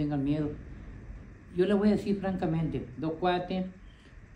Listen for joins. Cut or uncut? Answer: uncut